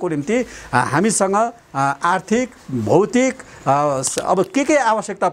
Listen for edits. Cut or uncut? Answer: uncut